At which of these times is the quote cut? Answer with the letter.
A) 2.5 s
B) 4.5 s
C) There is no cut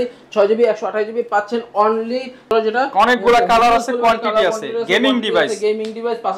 A